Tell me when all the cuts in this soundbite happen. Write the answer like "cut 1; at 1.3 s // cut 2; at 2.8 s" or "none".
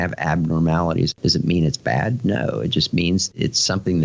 cut 1; at 1.1 s // cut 2; at 3.3 s